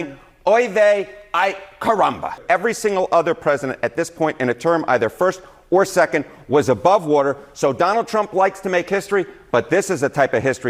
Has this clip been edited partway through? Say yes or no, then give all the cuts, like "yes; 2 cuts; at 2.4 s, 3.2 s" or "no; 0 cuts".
yes; 1 cut; at 2.4 s